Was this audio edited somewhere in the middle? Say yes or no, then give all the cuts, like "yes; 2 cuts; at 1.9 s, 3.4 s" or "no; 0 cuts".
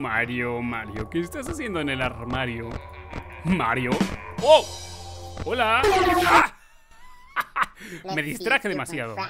no; 0 cuts